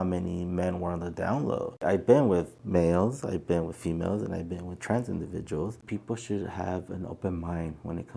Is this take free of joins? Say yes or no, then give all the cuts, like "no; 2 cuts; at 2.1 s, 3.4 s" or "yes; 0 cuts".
no; 2 cuts; at 1.7 s, 5.8 s